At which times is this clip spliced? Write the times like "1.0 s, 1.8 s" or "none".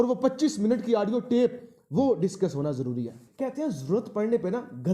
3.2 s